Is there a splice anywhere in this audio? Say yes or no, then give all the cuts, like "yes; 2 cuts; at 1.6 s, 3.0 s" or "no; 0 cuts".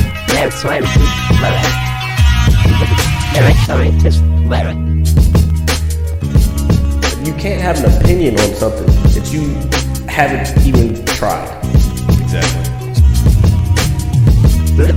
no; 0 cuts